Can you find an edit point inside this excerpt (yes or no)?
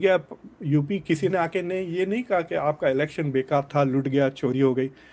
no